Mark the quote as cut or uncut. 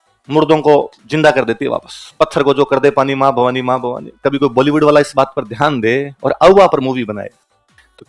cut